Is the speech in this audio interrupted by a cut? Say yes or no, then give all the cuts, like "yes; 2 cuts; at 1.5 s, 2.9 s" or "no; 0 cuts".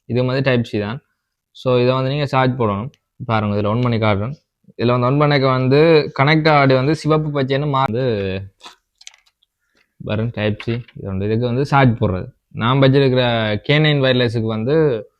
yes; 1 cut; at 7.9 s